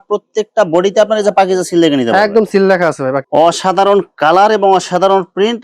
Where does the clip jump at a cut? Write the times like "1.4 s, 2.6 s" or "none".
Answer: 3.2 s